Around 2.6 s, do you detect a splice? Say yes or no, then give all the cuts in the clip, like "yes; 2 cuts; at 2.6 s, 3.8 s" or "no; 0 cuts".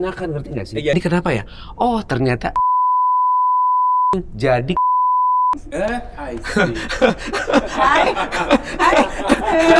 no; 1 cut; at 0.9 s